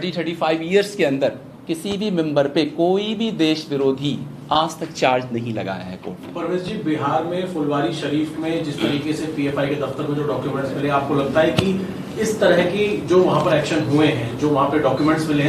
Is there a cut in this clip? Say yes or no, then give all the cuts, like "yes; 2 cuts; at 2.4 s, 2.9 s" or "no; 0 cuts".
no; 0 cuts